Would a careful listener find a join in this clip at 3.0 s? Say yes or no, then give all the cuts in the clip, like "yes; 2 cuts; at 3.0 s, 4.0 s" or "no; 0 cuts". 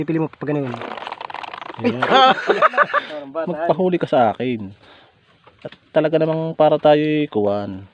yes; 1 cut; at 3.0 s